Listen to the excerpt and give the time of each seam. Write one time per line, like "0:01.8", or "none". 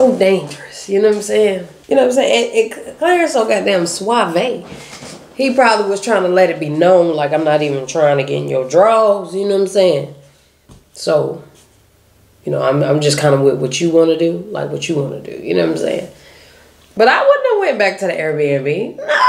0:01.7